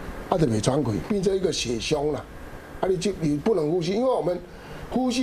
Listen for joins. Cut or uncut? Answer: cut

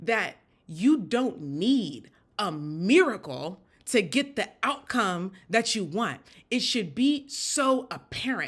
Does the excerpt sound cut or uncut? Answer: uncut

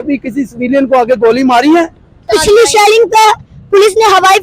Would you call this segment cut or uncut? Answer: cut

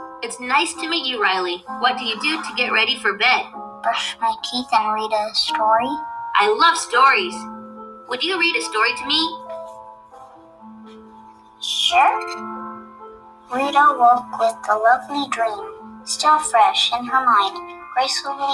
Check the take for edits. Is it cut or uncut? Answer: cut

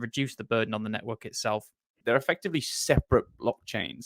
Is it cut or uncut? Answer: cut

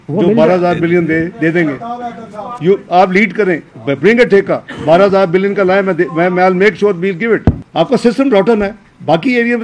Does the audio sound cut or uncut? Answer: cut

